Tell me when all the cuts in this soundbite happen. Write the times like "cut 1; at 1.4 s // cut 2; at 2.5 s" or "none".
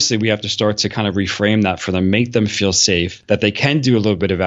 cut 1; at 3.2 s